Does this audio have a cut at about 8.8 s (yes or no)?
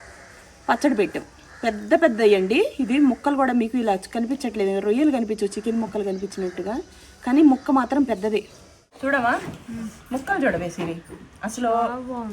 yes